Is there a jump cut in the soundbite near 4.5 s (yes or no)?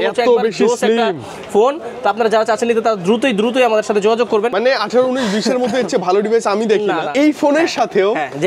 yes